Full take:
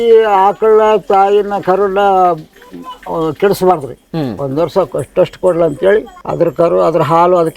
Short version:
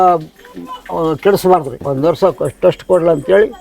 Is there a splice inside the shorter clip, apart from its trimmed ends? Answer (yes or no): yes